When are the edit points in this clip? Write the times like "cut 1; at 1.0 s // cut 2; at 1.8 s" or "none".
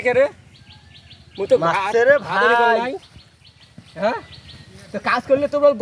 none